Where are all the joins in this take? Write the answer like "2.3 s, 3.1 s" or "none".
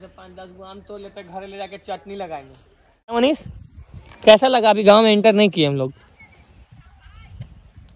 3.2 s